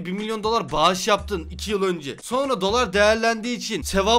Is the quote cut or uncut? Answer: uncut